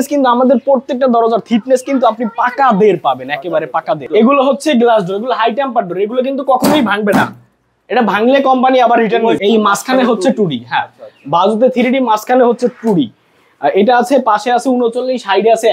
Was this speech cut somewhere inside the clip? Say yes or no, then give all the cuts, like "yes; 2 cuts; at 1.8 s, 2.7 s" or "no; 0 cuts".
yes; 2 cuts; at 4.1 s, 9.4 s